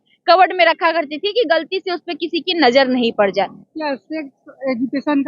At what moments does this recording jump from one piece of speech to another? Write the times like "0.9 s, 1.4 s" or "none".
3.6 s